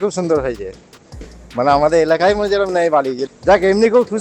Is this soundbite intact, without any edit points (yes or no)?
yes